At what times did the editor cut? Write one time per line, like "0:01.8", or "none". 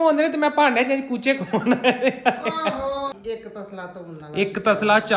0:03.2